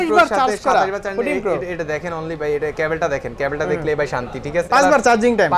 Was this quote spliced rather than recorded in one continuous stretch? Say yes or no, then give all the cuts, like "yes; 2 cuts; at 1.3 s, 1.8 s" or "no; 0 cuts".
yes; 1 cut; at 4.7 s